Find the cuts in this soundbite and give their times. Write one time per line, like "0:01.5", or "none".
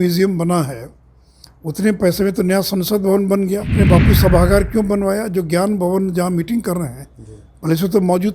0:03.7

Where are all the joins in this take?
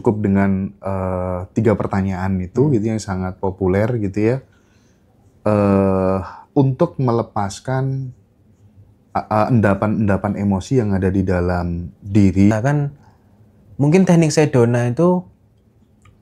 0:12.5

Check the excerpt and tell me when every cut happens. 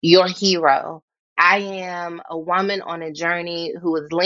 0:01.3

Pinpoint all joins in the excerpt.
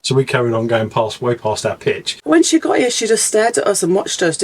0:02.1

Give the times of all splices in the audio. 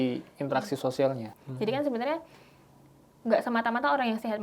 0:01.3

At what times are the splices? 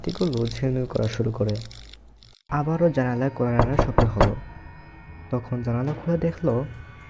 0:02.5

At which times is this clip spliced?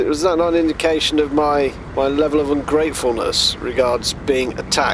0:01.8

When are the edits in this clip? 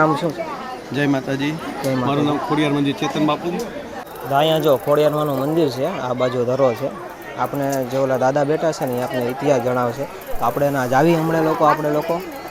0:04.1

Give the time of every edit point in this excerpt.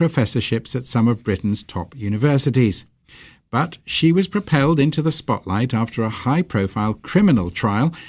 none

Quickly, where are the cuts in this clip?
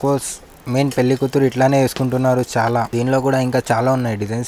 0:02.9

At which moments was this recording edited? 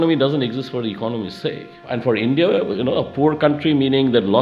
0:01.7

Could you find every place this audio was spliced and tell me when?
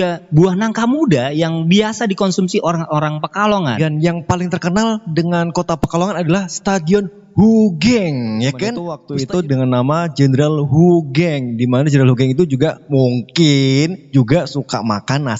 0:03.8
0:09.0

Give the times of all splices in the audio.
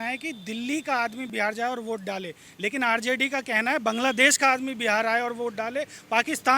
0:01.3

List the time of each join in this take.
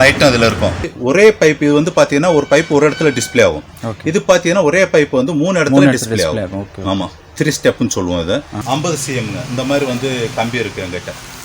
0:00.9
0:08.5

